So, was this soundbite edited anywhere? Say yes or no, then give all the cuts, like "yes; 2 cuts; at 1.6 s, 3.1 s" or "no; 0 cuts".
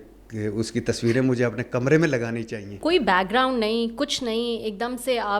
yes; 1 cut; at 2.8 s